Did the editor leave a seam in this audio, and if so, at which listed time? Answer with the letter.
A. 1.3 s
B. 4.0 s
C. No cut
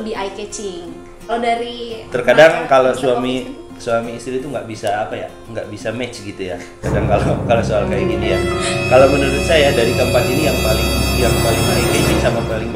A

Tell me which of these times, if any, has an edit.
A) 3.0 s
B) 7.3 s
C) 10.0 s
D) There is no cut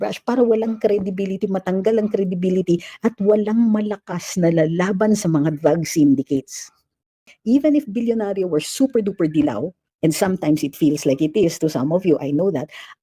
B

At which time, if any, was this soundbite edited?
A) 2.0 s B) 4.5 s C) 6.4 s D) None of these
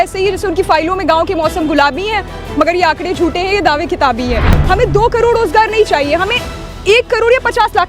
B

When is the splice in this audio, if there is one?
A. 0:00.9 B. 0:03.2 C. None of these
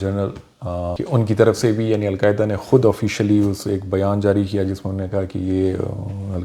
A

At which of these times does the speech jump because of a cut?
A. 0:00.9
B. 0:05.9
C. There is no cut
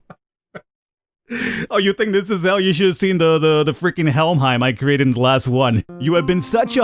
B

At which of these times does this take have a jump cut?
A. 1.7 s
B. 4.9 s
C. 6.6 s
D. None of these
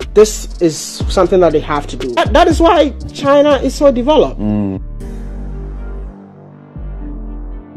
B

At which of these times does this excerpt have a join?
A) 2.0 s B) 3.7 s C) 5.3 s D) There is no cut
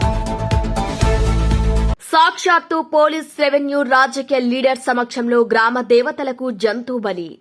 A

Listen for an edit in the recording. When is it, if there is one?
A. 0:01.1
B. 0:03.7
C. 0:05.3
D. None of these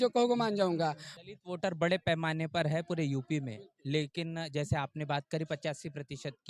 A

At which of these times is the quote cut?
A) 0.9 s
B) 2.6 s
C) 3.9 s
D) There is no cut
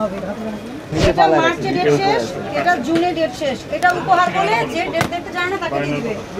A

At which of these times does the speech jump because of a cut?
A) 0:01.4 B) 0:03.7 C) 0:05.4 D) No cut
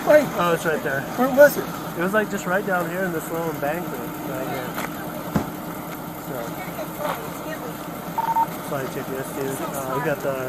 D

